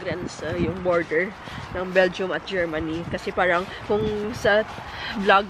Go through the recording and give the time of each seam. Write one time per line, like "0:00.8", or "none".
none